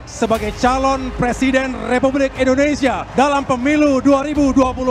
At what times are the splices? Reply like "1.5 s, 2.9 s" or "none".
none